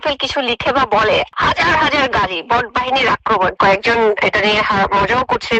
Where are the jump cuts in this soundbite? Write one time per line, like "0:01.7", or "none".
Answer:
0:01.3
0:03.5